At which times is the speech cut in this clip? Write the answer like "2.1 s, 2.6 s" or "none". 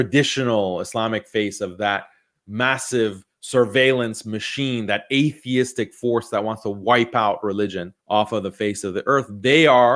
none